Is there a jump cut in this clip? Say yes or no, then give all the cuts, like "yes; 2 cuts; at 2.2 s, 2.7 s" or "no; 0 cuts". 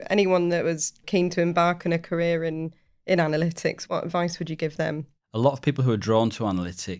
yes; 3 cuts; at 1.0 s, 3.8 s, 5.2 s